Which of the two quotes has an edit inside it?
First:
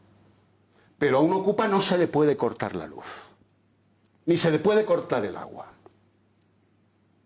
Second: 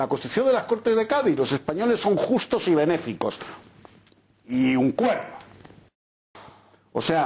second; 1 cut; at 6.0 s

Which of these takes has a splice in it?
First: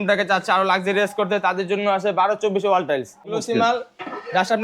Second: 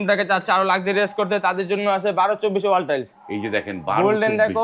first; 1 cut; at 3.3 s

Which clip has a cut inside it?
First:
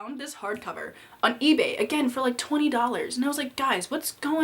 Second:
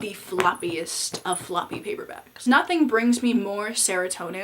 second; 1 cut; at 2.4 s

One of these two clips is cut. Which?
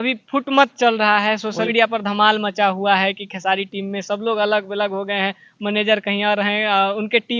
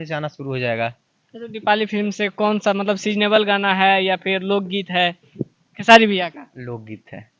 first; 1 cut; at 1.7 s

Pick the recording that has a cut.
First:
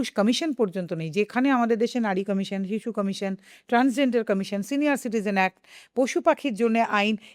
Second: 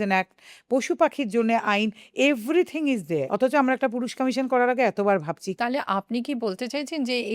second; 2 cuts; at 3.3 s, 5.5 s

